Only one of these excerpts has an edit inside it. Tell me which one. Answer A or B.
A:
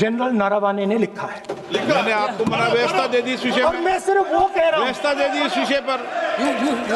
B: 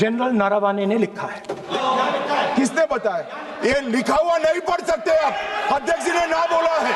B